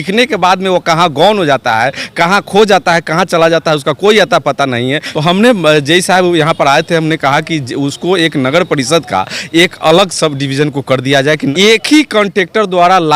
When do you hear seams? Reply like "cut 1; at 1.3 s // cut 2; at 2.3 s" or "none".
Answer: cut 1; at 5.1 s // cut 2; at 11.5 s